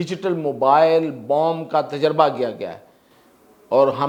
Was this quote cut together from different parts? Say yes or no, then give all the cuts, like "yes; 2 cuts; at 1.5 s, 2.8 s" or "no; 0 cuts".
no; 0 cuts